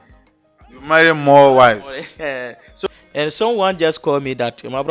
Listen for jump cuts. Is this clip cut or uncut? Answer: cut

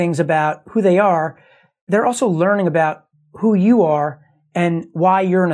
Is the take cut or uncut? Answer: cut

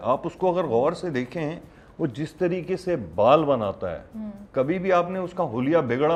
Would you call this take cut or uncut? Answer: uncut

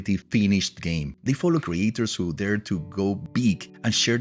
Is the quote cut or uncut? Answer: uncut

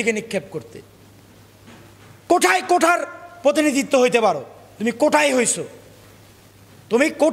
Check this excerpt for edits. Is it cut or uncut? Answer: cut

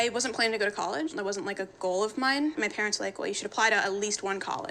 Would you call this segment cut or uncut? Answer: cut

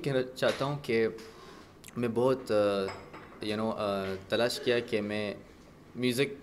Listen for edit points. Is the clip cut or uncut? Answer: uncut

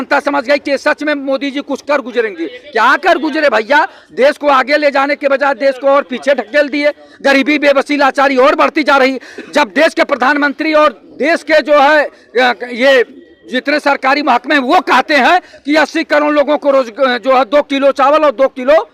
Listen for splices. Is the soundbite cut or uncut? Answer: uncut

